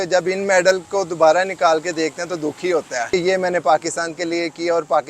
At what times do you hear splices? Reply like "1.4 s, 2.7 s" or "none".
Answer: 3.1 s